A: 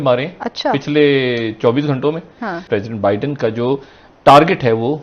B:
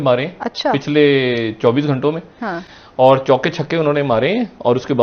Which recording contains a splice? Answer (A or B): A